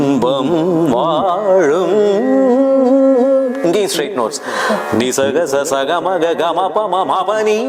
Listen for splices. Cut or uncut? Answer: uncut